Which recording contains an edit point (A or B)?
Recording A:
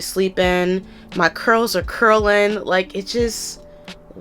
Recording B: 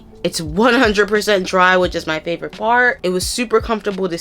B